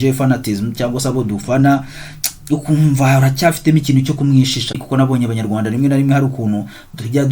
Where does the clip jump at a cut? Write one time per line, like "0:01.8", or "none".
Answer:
0:04.8